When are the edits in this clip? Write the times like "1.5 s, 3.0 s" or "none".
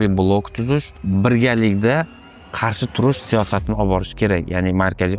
0.9 s